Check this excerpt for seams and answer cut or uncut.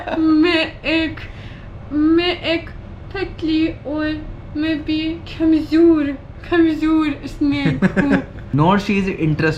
cut